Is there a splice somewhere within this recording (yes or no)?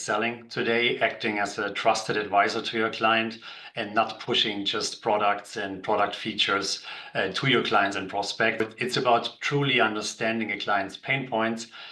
yes